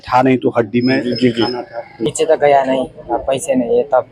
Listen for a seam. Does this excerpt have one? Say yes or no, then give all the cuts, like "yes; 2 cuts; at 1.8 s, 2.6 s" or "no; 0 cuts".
yes; 1 cut; at 2.0 s